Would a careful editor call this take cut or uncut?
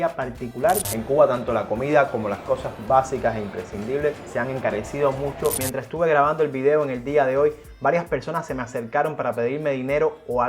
cut